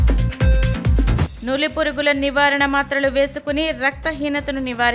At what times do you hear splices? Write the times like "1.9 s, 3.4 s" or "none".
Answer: 1.1 s